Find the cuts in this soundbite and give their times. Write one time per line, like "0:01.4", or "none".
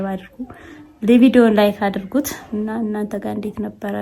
0:02.4